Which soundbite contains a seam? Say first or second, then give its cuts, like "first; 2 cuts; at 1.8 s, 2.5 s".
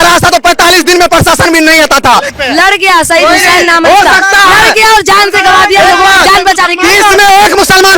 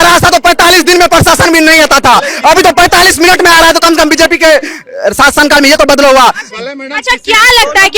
first; 1 cut; at 2.3 s